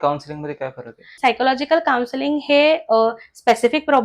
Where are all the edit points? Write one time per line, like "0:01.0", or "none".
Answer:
0:01.0